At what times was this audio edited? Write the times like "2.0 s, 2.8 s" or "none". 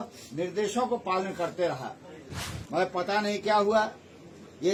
none